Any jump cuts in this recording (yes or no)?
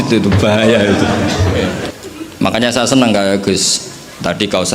yes